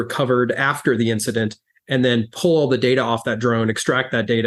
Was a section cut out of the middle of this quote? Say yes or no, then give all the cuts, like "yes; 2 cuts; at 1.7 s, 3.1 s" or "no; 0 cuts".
no; 0 cuts